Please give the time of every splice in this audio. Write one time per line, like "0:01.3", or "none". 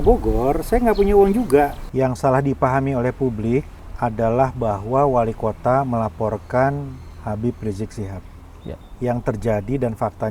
0:01.8
0:03.8
0:08.9